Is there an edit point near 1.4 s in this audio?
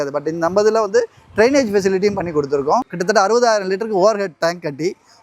no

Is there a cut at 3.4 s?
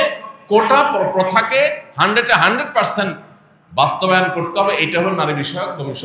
no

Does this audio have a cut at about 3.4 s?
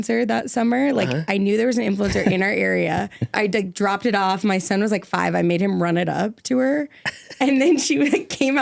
yes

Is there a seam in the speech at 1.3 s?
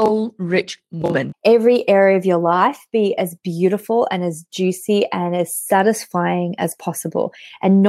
yes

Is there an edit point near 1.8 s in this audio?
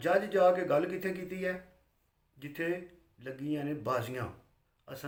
no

